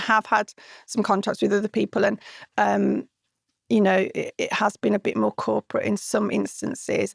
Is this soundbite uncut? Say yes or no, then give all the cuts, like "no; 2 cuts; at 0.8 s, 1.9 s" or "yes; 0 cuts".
yes; 0 cuts